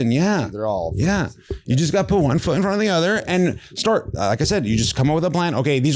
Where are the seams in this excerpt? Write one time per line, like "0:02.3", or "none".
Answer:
none